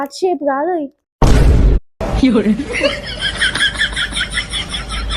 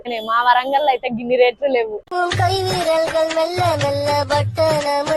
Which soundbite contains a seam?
first; 1 cut; at 0.9 s

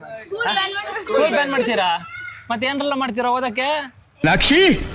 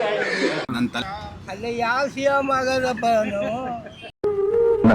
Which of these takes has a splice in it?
second; 1 cut; at 1.0 s

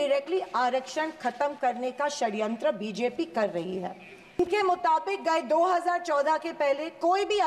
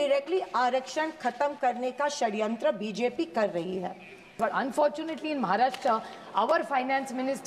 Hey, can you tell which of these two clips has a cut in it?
second; 1 cut; at 4.3 s

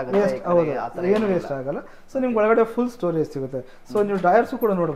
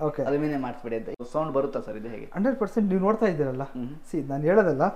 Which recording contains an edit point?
second; 1 cut; at 1.1 s

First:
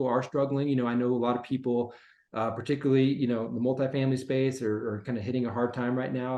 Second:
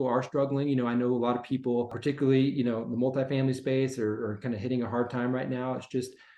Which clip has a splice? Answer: second; 1 cut; at 1.9 s

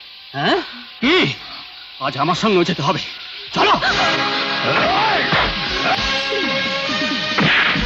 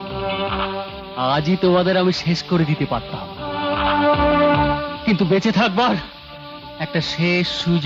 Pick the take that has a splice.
first; 1 cut; at 5.9 s

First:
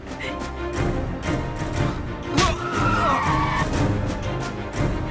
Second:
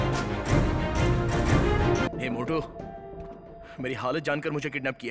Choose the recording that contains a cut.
second; 1 cut; at 2.1 s

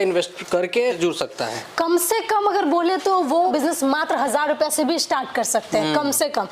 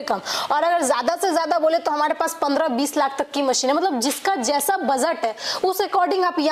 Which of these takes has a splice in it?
first; 2 cuts; at 1.0 s, 3.5 s

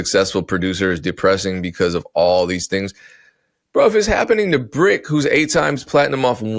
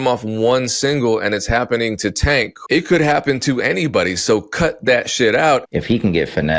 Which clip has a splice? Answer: second; 2 cuts; at 2.6 s, 5.7 s

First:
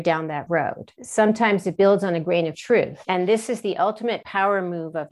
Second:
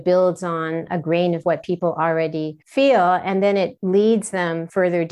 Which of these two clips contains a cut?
first; 2 cuts; at 1.0 s, 3.0 s

